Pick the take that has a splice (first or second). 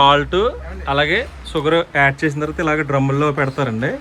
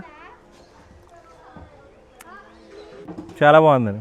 second